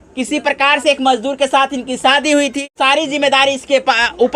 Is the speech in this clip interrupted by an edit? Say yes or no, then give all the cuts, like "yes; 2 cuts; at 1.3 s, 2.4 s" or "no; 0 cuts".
yes; 1 cut; at 2.6 s